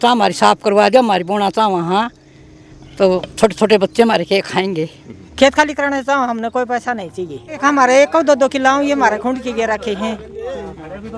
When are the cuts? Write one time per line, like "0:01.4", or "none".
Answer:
none